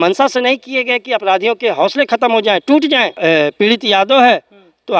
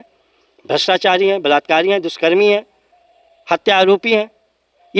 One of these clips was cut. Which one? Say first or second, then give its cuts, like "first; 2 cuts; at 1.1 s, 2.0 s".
first; 1 cut; at 3.1 s